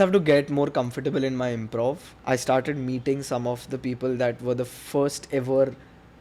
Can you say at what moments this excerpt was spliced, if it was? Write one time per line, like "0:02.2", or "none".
0:02.1